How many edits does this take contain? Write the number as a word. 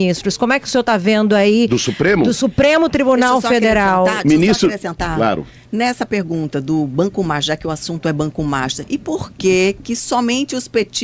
zero